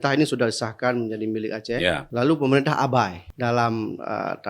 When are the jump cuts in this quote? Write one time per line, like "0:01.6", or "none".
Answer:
0:02.0
0:03.2